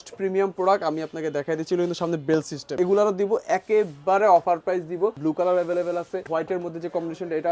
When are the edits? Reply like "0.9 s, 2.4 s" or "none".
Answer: 2.8 s, 5.2 s, 6.2 s